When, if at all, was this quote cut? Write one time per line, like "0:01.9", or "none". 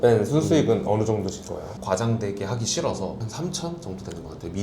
0:01.8
0:03.2